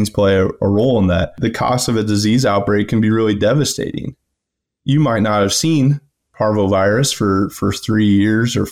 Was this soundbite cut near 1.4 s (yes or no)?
yes